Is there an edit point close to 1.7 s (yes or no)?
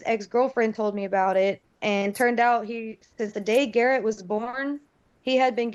no